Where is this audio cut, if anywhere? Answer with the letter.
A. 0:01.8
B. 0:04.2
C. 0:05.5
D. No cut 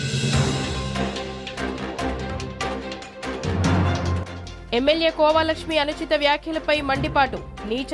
B